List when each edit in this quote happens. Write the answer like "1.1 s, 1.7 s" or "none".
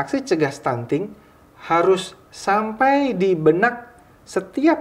none